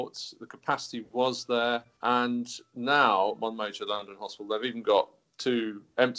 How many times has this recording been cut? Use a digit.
1